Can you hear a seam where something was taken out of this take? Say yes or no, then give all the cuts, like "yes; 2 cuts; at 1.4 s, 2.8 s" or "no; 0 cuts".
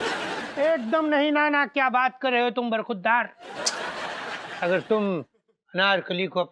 no; 0 cuts